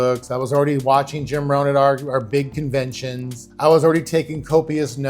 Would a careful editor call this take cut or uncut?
uncut